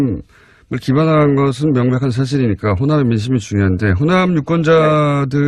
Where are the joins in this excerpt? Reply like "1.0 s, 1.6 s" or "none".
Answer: none